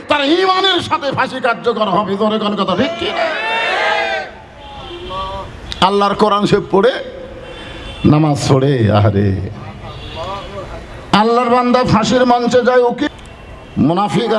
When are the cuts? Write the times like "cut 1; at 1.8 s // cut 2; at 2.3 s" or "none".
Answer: cut 1; at 13.1 s